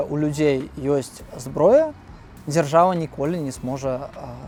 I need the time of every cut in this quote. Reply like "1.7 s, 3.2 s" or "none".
none

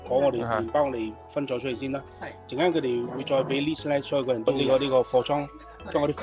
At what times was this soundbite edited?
4.5 s

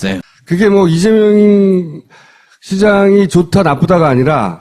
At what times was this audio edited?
1.5 s

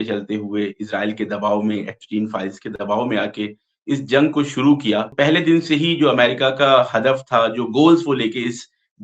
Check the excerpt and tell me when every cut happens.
5.1 s

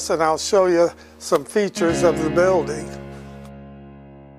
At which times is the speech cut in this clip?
none

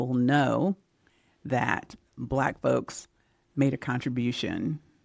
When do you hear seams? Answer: none

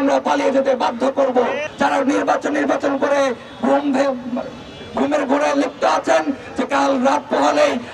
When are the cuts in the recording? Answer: 1.6 s

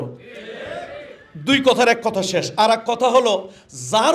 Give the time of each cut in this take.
none

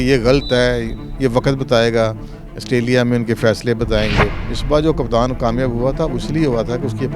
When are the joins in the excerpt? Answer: 4.5 s

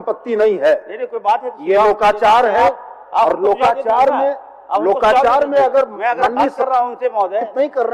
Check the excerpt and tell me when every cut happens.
none

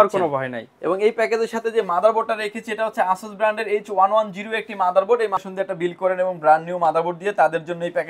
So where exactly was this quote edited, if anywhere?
5.4 s

